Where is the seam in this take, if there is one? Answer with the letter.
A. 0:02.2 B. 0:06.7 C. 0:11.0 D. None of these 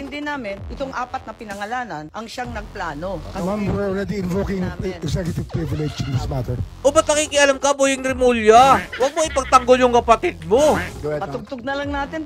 C